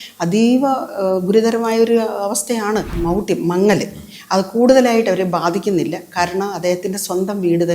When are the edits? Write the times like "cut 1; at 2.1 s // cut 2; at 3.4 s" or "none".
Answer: cut 1; at 2.9 s